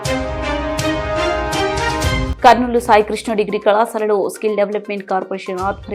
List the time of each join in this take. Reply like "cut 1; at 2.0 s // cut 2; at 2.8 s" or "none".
cut 1; at 2.3 s